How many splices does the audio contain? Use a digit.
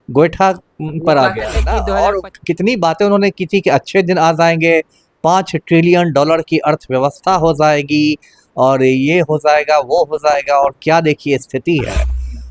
1